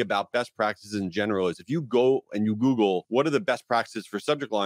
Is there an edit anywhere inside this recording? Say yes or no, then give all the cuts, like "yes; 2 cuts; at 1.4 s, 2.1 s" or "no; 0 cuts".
yes; 1 cut; at 3.0 s